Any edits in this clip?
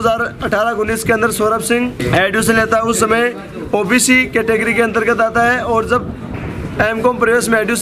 yes; 1 cut; at 2.0 s

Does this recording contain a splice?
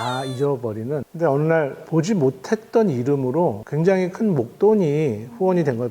yes; 3 cuts; at 1.0 s, 1.9 s, 3.6 s

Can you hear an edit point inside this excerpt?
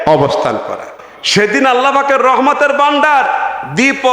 yes; 1 cut; at 1.1 s

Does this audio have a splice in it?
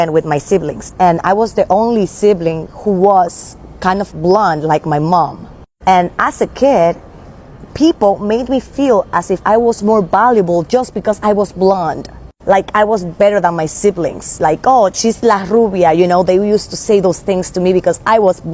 no; 0 cuts

